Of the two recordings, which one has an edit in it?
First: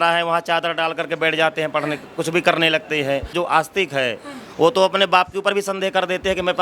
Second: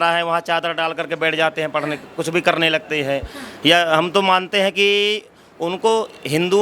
first; 1 cut; at 3.3 s

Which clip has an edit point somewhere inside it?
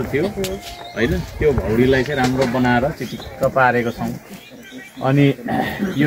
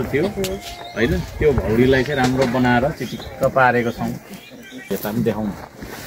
second; 1 cut; at 4.9 s

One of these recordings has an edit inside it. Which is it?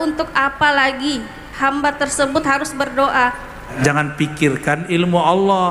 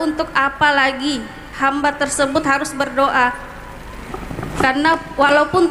first; 1 cut; at 3.7 s

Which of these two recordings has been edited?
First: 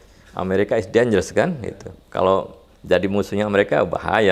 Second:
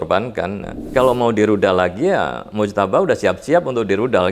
second; 2 cuts; at 0.9 s, 2.4 s

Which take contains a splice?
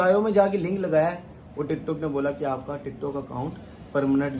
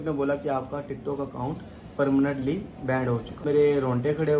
second; 1 cut; at 3.5 s

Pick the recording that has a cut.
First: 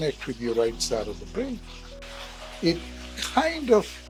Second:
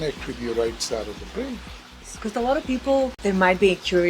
second; 2 cuts; at 2.1 s, 3.2 s

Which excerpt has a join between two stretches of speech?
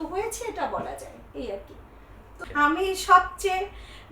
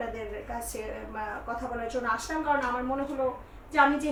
first; 1 cut; at 2.3 s

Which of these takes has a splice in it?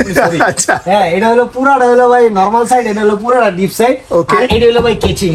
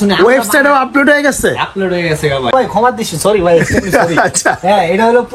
second; 1 cut; at 2.5 s

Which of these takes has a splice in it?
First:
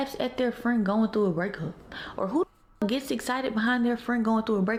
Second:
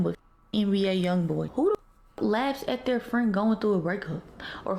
second; 1 cut; at 1.5 s

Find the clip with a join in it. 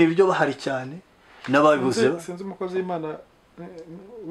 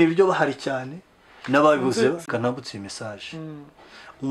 second; 1 cut; at 2.3 s

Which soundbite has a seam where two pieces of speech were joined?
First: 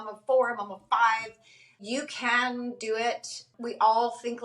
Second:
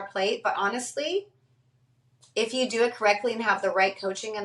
first; 2 cuts; at 1.8 s, 3.5 s

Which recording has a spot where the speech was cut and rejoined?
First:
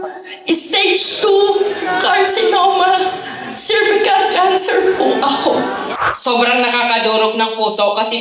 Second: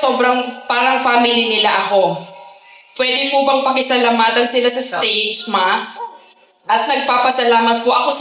first; 1 cut; at 6.0 s

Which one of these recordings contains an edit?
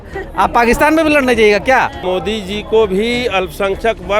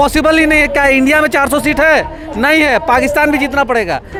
first; 1 cut; at 2.0 s

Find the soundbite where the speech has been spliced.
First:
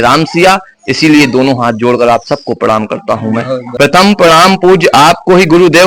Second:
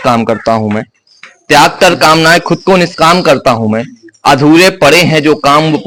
first; 1 cut; at 3.7 s

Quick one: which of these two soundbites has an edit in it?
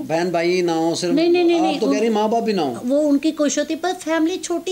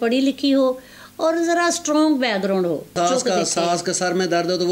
second; 1 cut; at 2.9 s

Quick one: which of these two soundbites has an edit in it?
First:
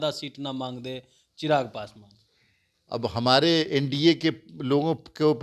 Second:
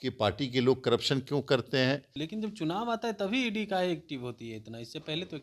second; 1 cut; at 2.2 s

